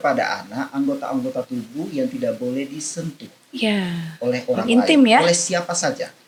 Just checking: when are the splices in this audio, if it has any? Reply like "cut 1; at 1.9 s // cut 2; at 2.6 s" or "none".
none